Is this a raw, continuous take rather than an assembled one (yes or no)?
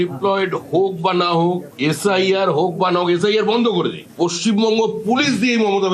no